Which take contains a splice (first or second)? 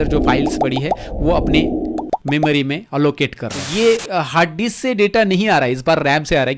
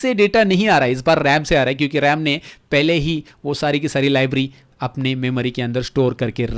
first